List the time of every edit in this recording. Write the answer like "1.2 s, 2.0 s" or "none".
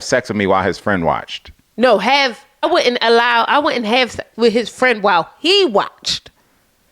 2.5 s